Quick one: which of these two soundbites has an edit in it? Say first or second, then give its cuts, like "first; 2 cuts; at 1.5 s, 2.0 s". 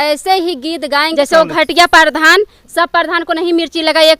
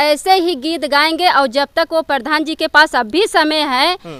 first; 1 cut; at 1.1 s